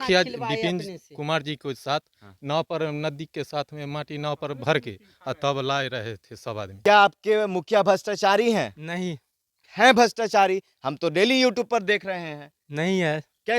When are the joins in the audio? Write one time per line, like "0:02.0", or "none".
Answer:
0:06.7